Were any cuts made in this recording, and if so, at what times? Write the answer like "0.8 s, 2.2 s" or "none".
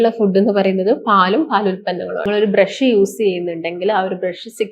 2.3 s

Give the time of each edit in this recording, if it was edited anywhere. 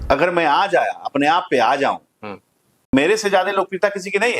2.7 s

